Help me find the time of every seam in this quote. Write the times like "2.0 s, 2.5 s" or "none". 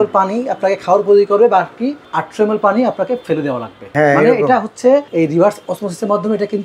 3.9 s, 5.1 s